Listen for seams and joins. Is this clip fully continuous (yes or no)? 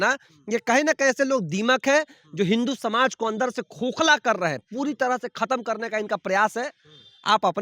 yes